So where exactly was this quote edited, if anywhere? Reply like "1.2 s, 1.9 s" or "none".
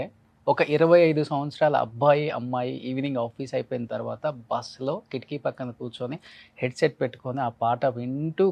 none

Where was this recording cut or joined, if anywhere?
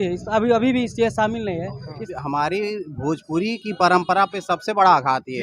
2.0 s

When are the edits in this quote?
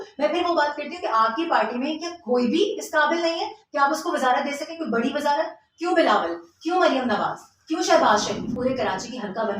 8.5 s

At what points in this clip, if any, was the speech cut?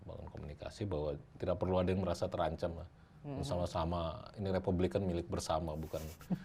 none

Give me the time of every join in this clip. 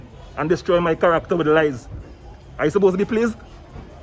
none

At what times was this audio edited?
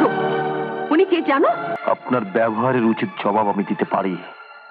1.7 s

